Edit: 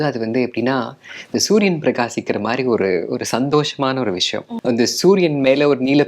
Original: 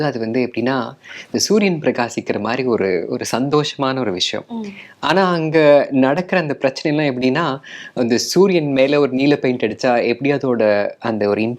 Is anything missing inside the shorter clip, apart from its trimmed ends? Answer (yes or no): yes